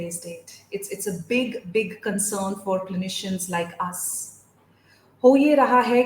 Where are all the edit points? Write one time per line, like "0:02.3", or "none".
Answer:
none